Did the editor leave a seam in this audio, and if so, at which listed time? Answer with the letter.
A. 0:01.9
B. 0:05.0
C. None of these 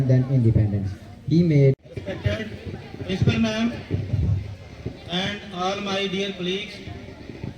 A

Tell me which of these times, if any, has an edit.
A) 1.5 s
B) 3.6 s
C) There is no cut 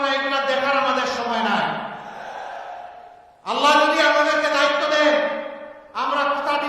A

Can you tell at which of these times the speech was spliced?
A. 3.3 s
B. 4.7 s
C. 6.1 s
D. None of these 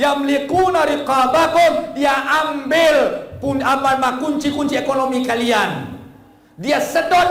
D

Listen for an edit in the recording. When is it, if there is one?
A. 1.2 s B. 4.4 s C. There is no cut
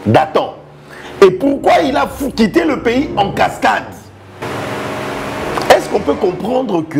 B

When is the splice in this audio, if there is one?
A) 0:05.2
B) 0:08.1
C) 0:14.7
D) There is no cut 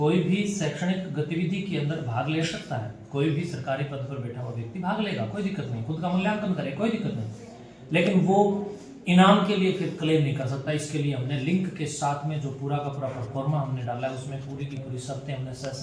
D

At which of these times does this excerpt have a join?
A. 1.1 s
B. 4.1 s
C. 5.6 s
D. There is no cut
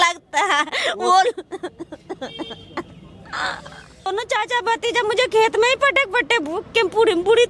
B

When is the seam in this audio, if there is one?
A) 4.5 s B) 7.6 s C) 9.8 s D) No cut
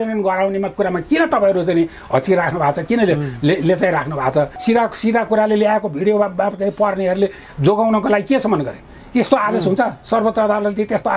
A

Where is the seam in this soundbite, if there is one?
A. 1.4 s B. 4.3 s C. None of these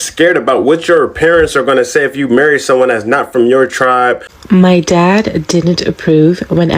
B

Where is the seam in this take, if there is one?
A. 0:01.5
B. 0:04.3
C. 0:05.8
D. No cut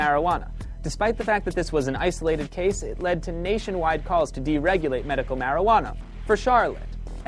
D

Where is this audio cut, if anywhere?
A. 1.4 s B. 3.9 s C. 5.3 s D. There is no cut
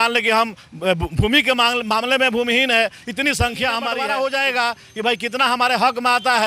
B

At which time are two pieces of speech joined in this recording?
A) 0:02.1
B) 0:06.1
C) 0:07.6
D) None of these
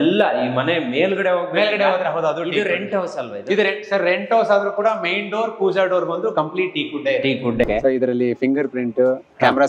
C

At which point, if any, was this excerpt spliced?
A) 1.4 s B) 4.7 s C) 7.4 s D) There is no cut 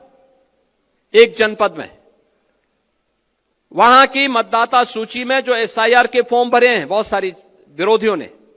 D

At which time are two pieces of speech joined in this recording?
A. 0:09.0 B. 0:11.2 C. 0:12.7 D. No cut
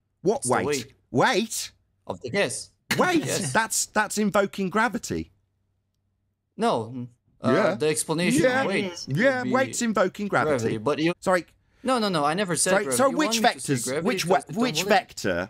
B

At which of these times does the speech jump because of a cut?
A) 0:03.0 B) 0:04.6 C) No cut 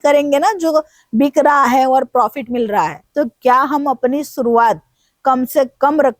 A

